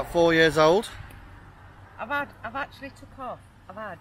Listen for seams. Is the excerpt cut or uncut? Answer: uncut